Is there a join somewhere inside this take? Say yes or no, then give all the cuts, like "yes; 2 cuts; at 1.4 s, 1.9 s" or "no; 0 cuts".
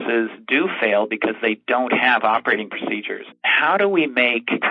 yes; 1 cut; at 3.4 s